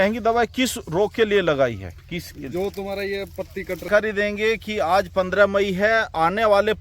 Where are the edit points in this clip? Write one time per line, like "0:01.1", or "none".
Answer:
0:03.8